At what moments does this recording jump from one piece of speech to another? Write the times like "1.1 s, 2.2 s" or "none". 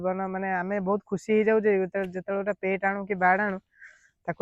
none